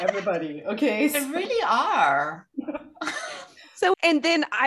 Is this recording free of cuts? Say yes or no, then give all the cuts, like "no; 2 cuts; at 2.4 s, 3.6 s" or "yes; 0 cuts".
yes; 0 cuts